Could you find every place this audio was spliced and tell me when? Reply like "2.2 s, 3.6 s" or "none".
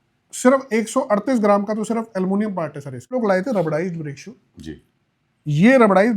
3.2 s